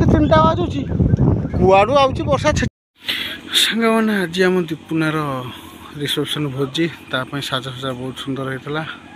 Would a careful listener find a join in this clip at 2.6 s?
yes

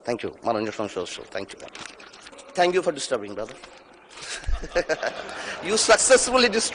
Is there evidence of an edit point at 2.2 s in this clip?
yes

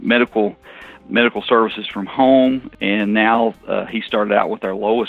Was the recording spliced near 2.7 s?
yes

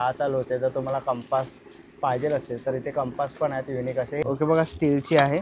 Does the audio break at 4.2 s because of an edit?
yes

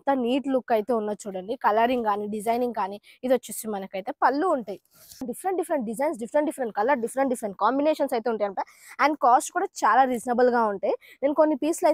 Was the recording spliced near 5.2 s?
yes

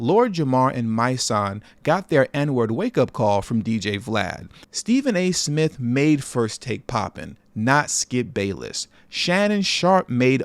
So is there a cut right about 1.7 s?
no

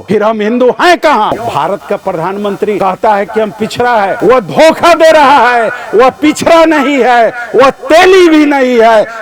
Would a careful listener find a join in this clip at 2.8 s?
yes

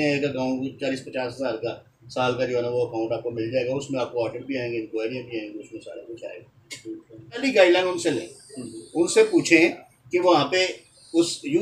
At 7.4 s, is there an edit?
yes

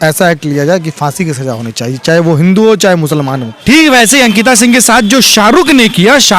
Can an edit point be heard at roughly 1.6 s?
no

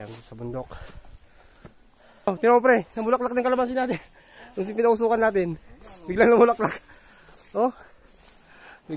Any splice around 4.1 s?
no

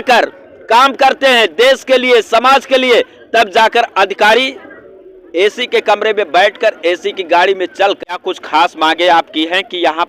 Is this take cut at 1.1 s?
no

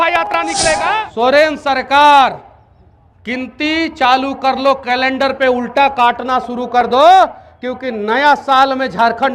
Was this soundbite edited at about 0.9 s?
yes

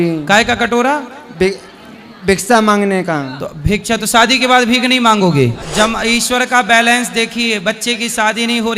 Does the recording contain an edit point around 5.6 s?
yes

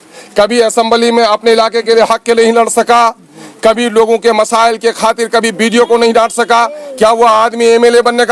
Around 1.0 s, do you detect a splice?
no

